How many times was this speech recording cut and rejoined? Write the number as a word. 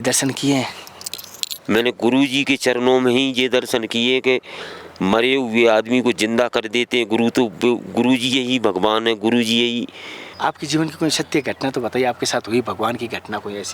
one